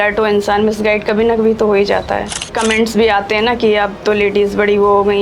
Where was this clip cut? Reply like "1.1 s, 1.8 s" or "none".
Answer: 2.5 s